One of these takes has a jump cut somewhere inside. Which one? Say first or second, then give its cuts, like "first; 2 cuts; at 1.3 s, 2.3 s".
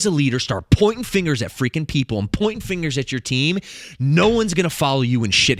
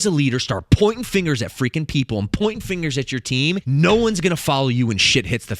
second; 1 cut; at 3.6 s